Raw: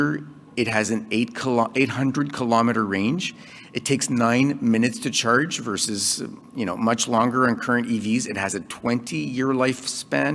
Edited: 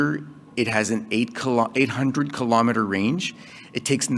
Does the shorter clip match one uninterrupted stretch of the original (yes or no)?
yes